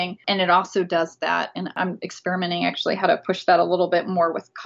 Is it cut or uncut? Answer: cut